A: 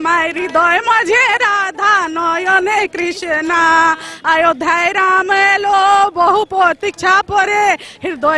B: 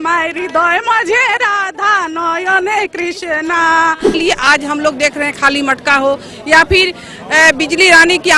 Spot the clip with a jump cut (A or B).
B